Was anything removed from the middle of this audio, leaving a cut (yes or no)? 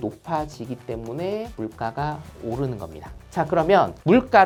no